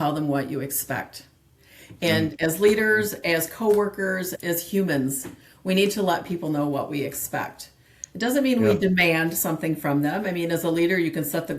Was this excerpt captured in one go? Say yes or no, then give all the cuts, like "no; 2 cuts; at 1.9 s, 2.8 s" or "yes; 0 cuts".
no; 1 cut; at 4.3 s